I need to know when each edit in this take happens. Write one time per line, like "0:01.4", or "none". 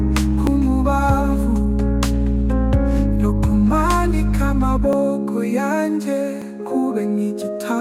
none

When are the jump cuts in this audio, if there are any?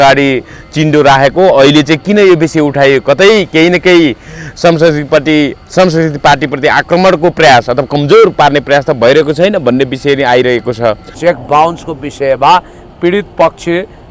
0:11.1

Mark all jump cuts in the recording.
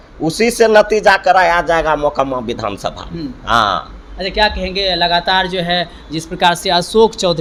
none

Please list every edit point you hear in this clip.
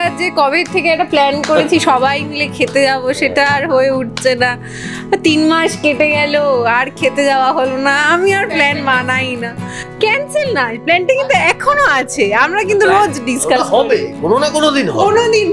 none

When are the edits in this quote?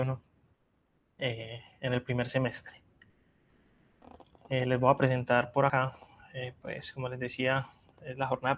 0:05.7

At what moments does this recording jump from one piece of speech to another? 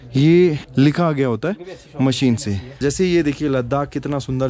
0:02.8

